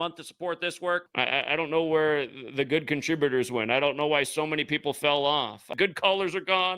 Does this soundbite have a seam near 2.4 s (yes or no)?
no